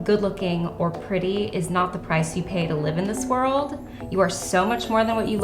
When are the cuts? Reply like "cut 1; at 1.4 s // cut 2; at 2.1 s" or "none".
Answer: none